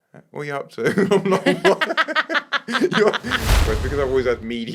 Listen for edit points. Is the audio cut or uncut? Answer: cut